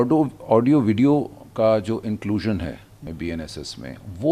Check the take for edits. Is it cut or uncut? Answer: cut